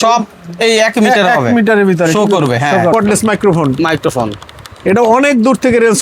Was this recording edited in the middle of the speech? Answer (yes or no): yes